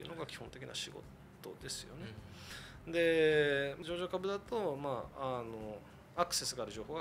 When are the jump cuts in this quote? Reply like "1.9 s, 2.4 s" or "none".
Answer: none